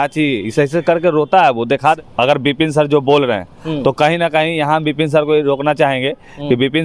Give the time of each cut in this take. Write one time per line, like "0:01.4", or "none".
0:02.0